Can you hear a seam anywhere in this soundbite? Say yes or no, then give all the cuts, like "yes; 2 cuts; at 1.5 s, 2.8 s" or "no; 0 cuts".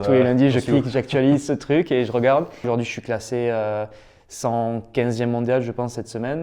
yes; 1 cut; at 2.7 s